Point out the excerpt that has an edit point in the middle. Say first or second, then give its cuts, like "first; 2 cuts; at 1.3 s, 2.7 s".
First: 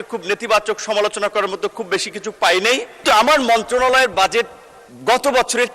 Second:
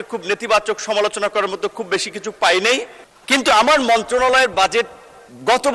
first; 1 cut; at 3.0 s